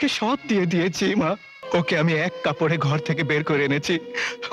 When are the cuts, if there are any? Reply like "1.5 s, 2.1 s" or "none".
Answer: 1.5 s